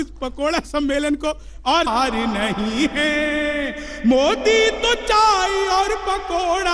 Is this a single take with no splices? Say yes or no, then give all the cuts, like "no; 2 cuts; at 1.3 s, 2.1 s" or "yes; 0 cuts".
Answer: no; 1 cut; at 1.9 s